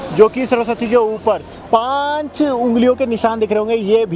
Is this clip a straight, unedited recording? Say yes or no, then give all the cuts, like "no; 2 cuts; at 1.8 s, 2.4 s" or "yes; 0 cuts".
no; 1 cut; at 1.6 s